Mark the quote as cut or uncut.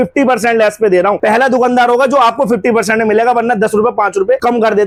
uncut